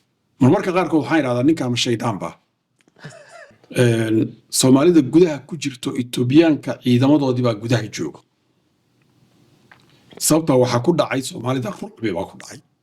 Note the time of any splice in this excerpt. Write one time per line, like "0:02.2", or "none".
0:03.6